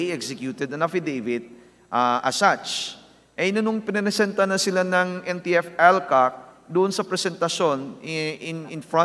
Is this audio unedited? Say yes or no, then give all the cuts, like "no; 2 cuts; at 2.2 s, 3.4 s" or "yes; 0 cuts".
yes; 0 cuts